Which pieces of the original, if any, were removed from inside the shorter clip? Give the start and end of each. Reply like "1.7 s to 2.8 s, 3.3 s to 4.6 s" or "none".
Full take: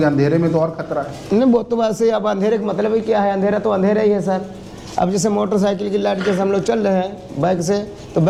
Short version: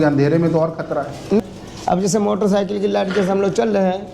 1.4 s to 4.5 s

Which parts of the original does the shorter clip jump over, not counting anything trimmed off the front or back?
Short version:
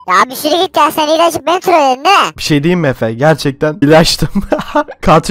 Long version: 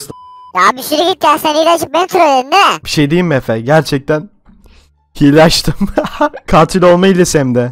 4.3 s to 5.3 s

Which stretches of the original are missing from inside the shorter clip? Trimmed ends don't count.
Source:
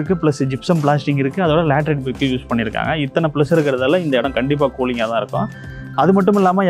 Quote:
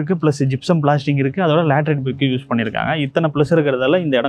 none

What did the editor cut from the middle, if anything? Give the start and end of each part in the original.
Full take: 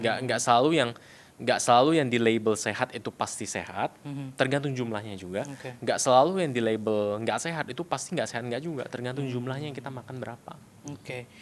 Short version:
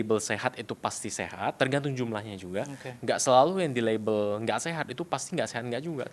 3.9 s to 4.3 s

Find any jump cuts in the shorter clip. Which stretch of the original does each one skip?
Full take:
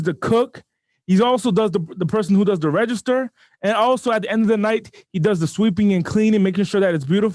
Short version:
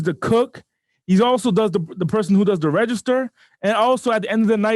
none

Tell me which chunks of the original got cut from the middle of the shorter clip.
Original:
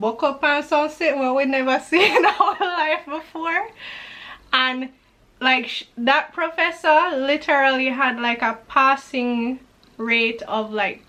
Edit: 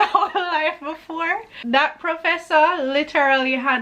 3.8 s to 5.9 s

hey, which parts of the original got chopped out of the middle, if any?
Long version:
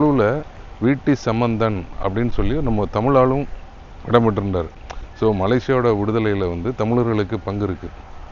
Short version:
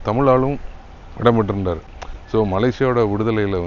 none

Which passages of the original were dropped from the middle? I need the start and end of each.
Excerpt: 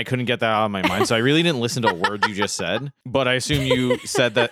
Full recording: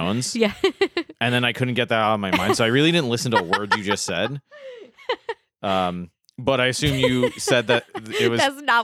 4.4 s to 6.3 s

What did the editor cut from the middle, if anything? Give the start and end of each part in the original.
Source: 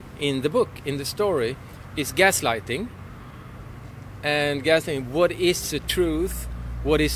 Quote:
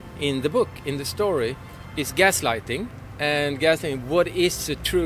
3.0 s to 4.1 s

